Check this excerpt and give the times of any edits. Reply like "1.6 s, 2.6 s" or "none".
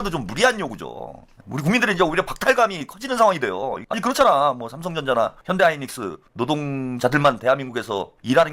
3.8 s, 5.4 s